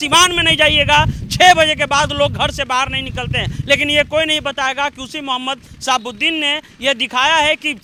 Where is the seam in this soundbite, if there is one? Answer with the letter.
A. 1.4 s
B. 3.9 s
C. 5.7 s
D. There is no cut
D